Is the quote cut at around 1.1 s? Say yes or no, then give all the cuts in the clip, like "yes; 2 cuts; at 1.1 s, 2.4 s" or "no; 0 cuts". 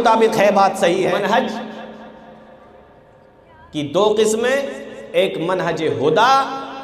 yes; 1 cut; at 1.1 s